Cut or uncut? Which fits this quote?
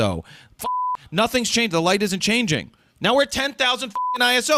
uncut